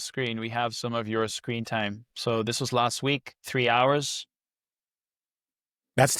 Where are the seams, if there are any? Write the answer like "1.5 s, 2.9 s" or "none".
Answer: none